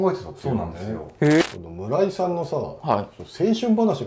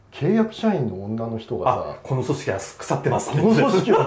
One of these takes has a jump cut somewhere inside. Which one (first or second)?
first